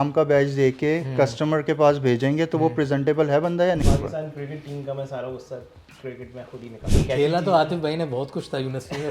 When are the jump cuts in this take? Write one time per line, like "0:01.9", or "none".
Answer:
0:03.8
0:06.8